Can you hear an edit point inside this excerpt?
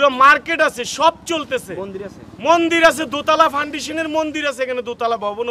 no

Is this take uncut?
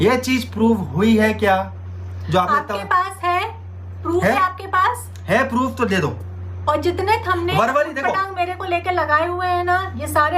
yes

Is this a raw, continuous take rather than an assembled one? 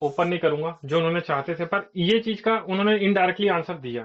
yes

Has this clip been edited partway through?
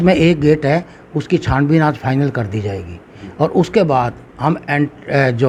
no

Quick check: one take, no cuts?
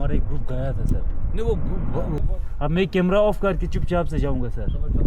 no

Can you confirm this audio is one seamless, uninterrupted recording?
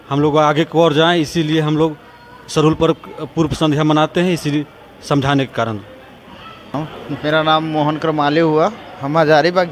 yes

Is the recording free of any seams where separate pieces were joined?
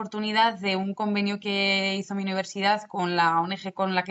yes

